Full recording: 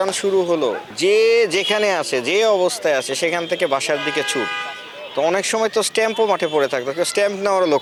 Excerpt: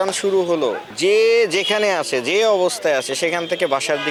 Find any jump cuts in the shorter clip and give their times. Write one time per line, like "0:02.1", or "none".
none